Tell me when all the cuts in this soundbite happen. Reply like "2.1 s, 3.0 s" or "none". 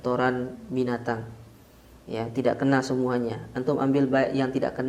none